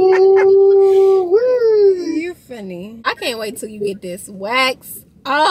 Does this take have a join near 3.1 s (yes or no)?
yes